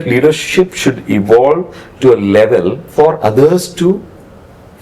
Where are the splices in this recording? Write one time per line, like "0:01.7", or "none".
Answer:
0:02.8